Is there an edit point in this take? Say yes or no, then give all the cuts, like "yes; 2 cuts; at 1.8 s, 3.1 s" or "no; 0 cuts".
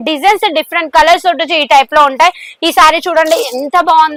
no; 0 cuts